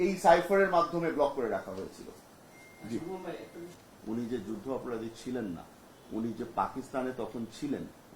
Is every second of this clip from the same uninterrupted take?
no; 1 cut; at 3.7 s

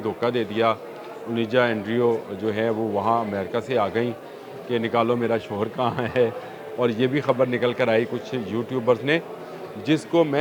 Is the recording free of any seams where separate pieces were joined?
yes; 0 cuts

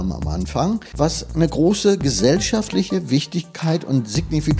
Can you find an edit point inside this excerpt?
yes; 1 cut; at 1.0 s

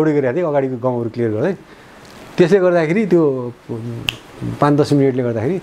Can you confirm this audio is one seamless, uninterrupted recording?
yes; 0 cuts

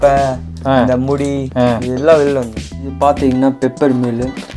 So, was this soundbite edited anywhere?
yes; 1 cut; at 2.9 s

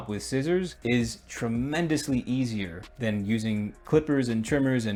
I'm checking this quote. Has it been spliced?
no; 0 cuts

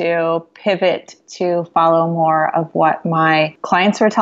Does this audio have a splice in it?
no; 0 cuts

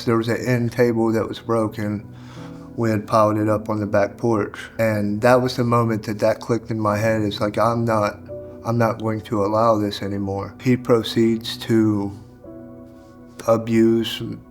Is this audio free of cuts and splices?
no; 2 cuts; at 4.6 s, 10.5 s

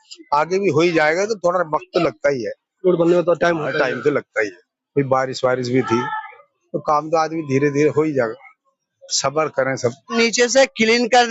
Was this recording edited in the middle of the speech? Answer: yes; 1 cut; at 10.1 s

